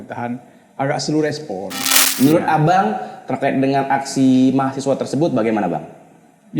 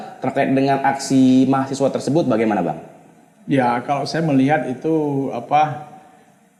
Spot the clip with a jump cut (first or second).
first